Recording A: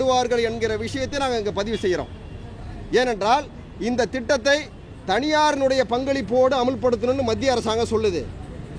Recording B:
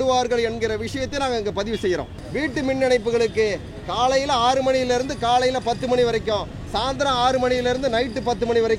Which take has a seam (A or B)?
B